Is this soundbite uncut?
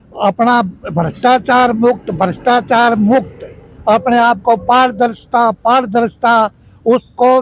yes; 0 cuts

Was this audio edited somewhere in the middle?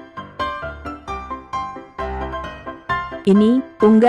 no; 0 cuts

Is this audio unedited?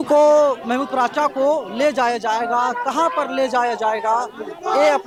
yes; 0 cuts

